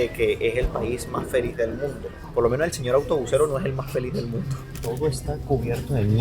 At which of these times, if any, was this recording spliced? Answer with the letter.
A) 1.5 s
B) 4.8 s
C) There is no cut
B